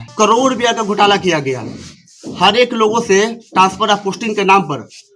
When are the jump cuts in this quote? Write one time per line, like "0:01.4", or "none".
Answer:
none